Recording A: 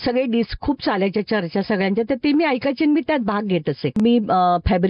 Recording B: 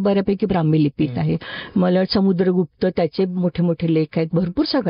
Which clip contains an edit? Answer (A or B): A